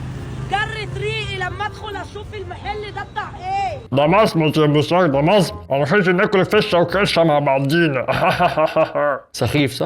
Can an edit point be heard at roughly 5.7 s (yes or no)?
no